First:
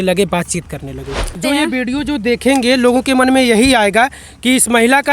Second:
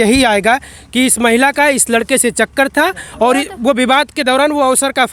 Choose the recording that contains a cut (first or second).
first